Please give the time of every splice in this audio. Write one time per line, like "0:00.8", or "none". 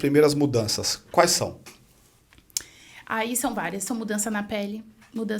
none